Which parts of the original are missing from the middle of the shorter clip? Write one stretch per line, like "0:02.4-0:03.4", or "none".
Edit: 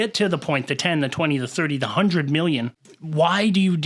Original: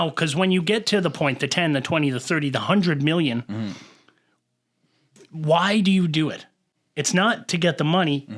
0:03.5-0:05.1